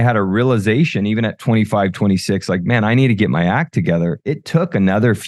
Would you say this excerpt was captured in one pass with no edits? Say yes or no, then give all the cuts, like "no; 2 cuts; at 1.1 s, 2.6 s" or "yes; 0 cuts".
yes; 0 cuts